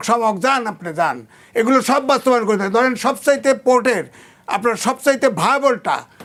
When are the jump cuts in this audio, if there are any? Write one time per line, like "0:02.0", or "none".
none